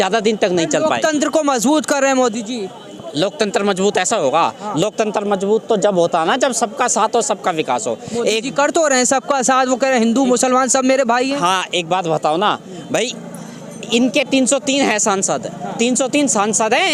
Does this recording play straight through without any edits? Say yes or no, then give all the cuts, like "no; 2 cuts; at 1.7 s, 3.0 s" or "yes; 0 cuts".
yes; 0 cuts